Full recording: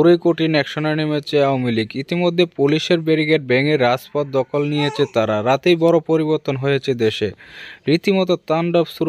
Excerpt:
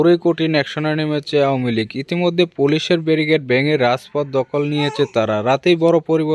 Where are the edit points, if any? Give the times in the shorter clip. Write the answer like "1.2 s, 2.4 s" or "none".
none